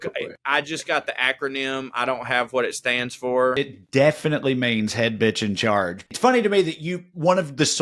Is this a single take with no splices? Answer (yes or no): no